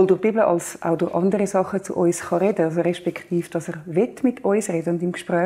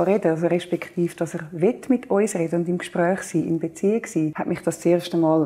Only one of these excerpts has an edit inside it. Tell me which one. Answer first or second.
second